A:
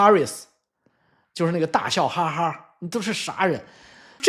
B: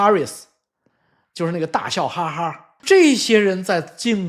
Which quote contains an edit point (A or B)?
B